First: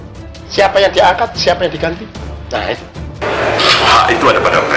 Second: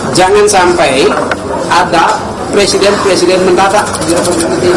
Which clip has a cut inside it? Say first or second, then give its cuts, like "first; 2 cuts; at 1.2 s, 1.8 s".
first; 1 cut; at 3.2 s